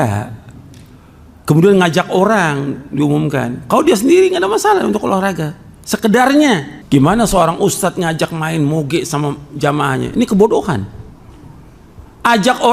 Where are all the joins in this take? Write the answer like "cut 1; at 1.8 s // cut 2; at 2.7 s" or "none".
cut 1; at 6.7 s